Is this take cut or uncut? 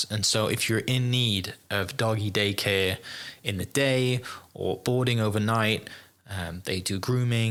uncut